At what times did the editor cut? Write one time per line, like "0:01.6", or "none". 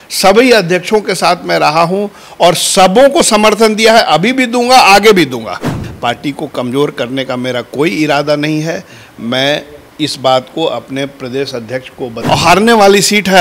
0:05.8
0:12.1